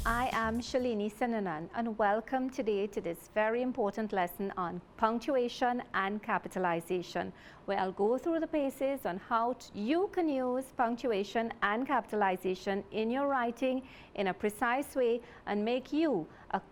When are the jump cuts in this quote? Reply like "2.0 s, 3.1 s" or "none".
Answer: none